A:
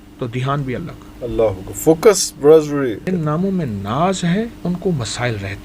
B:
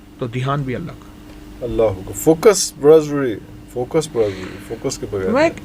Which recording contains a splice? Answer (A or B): A